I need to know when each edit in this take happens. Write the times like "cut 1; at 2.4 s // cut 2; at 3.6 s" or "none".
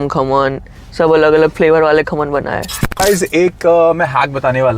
cut 1; at 3.0 s

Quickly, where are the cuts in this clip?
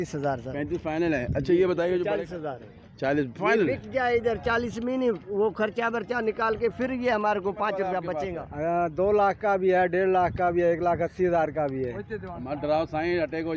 cut 1; at 2.0 s // cut 2; at 8.1 s

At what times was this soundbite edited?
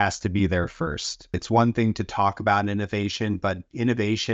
cut 1; at 1.3 s

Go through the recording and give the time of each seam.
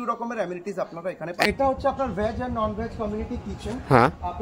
cut 1; at 1.5 s

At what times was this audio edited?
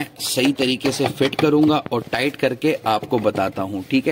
none

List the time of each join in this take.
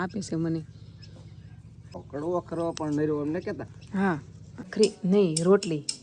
cut 1; at 2.0 s // cut 2; at 4.7 s

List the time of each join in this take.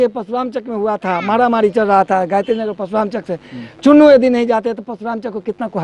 none

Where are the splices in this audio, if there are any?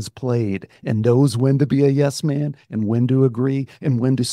none

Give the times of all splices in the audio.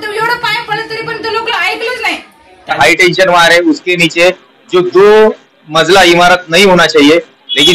cut 1; at 2.8 s

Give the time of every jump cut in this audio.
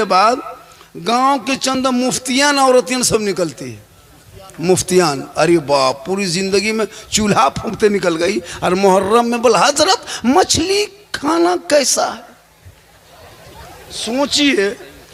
none

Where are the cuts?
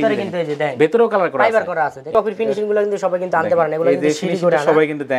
cut 1; at 2.1 s

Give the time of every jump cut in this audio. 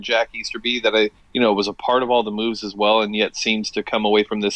none

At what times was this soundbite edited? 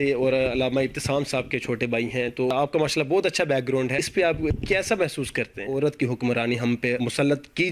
cut 1; at 2.5 s // cut 2; at 4.3 s // cut 3; at 5.6 s // cut 4; at 7.0 s

